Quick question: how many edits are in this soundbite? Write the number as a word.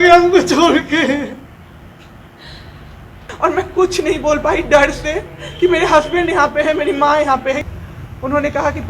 two